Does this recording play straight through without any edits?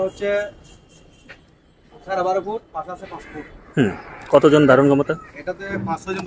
yes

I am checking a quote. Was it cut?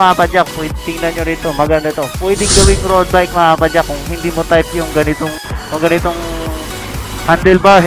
no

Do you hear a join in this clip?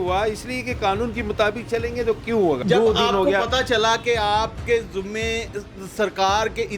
yes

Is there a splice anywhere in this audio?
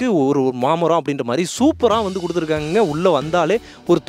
no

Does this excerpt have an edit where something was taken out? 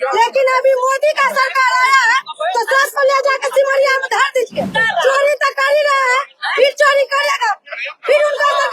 yes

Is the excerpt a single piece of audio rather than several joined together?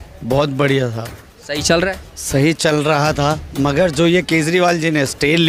yes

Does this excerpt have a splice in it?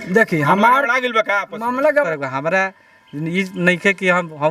yes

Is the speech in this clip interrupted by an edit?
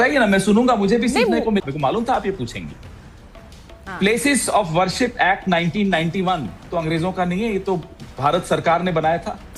yes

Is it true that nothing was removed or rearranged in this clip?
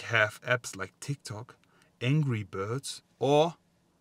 yes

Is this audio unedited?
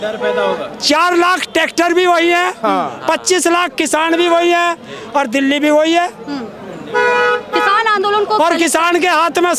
yes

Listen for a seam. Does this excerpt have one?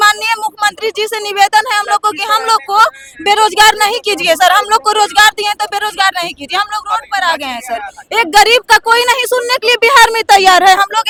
no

